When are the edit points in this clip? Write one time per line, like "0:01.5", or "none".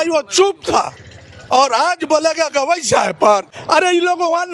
0:03.5